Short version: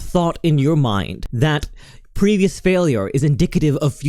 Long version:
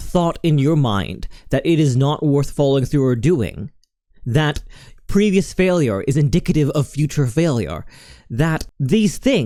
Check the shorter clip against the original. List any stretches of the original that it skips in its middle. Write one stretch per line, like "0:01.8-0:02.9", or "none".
0:01.2-0:04.1